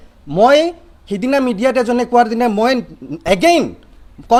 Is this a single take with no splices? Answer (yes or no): yes